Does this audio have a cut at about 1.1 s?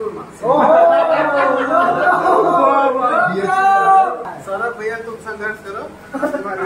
no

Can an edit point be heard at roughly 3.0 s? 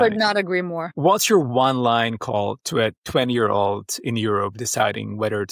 no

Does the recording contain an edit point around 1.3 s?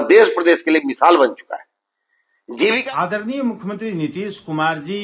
no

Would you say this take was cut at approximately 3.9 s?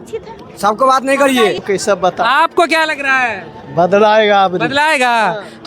no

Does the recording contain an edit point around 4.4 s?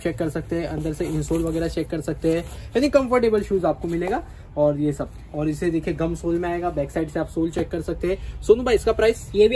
no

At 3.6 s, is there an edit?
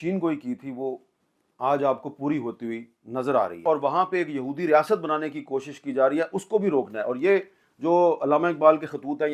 yes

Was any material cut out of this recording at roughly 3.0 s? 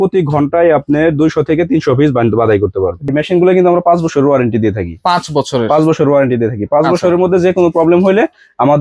yes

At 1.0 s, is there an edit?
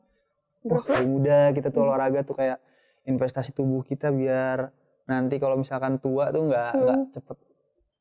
yes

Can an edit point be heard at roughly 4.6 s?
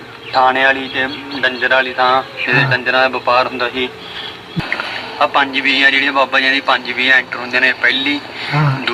yes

